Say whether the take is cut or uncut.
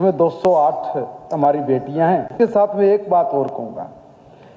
uncut